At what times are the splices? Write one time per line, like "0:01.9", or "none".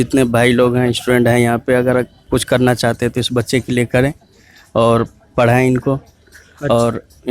none